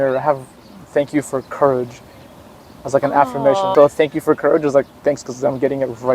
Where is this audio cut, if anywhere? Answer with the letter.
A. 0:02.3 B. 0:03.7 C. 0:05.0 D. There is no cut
B